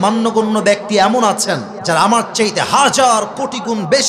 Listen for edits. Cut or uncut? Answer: cut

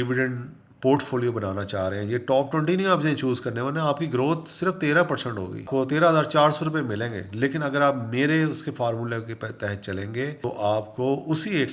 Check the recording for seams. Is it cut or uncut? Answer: cut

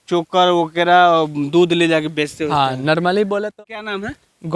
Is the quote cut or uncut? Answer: cut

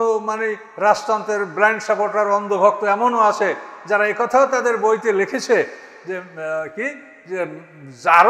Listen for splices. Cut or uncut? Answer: uncut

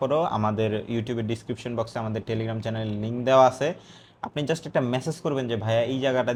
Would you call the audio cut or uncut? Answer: uncut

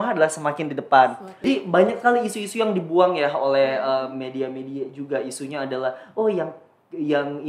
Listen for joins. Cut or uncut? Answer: cut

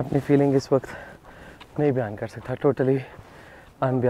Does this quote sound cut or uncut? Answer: uncut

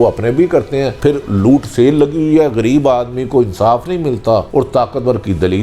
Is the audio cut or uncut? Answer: cut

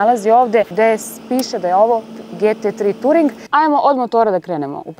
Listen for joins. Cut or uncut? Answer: cut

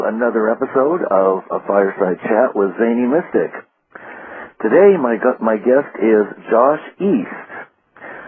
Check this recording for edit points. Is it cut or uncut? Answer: uncut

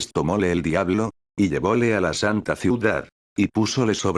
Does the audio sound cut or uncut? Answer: cut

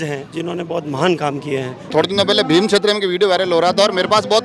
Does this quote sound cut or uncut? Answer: cut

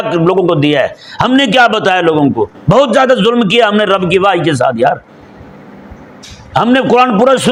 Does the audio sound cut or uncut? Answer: uncut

